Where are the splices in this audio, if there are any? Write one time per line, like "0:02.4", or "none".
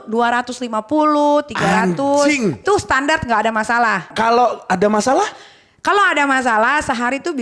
0:02.6
0:04.1